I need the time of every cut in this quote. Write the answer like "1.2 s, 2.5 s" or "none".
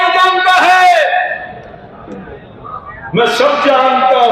none